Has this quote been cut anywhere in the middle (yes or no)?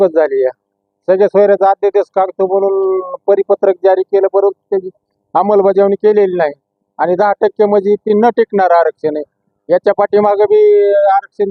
no